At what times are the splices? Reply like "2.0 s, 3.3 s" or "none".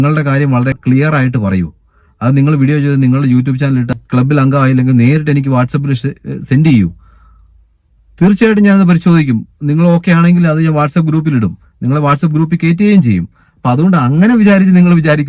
none